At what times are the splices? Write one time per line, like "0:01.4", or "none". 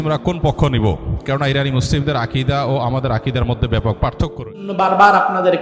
0:04.7